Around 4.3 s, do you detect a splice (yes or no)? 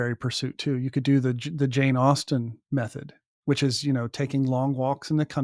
no